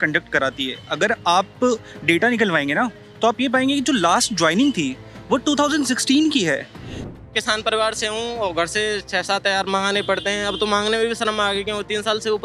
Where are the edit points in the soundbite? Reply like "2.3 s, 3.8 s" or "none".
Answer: 7.1 s